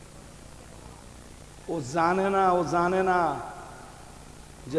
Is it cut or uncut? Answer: uncut